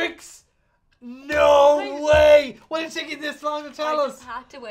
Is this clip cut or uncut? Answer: uncut